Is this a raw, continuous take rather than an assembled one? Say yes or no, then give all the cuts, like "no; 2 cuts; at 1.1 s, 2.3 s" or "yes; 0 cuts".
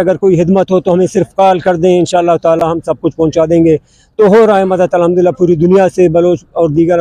yes; 0 cuts